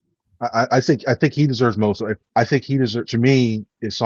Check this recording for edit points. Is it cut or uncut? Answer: cut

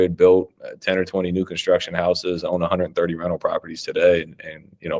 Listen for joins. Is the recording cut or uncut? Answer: uncut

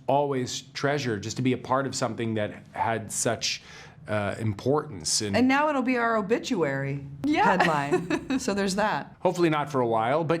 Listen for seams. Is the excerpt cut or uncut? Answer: cut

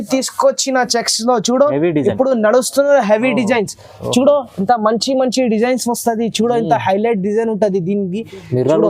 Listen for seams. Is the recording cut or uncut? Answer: uncut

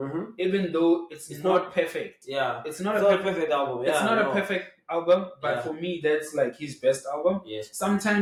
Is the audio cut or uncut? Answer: uncut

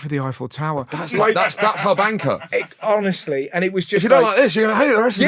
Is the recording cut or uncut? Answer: uncut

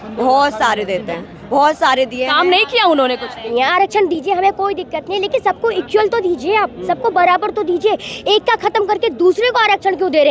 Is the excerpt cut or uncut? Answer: cut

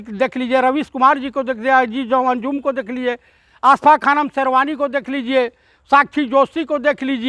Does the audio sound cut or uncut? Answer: uncut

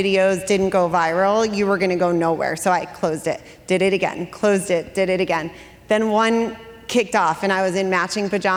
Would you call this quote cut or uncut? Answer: uncut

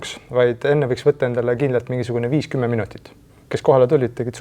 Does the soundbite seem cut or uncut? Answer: cut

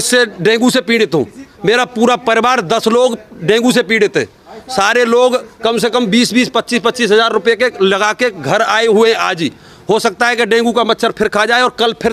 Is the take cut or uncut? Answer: uncut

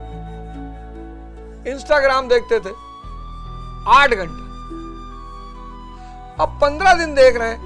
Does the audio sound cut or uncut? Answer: uncut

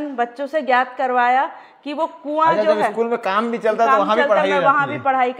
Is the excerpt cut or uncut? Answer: uncut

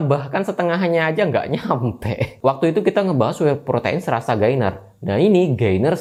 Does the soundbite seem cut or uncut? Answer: uncut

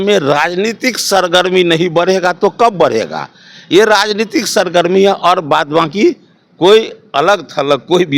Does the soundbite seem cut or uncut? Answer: uncut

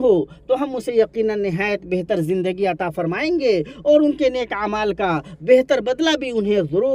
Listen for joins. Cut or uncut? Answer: uncut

